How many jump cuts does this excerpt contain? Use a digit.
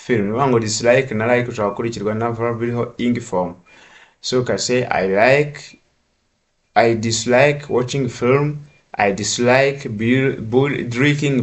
0